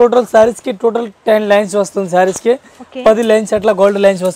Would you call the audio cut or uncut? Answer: uncut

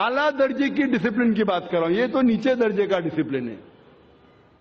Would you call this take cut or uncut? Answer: uncut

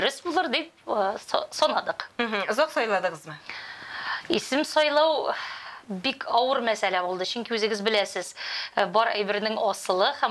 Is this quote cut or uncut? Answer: uncut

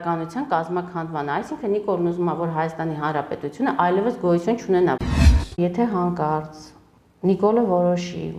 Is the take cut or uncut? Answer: cut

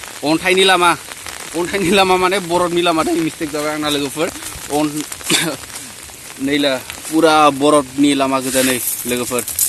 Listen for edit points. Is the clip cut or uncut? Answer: uncut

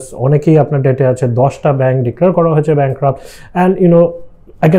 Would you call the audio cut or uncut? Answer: uncut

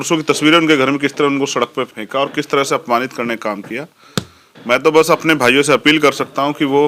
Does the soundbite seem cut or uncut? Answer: cut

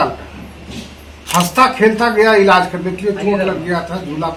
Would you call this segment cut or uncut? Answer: uncut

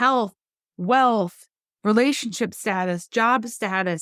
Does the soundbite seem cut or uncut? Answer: uncut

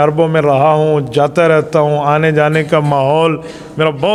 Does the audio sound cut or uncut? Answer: uncut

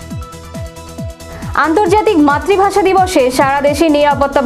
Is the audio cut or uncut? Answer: cut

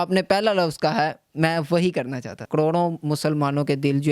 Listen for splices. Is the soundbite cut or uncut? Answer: cut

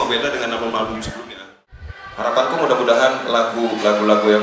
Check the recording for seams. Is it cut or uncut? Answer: cut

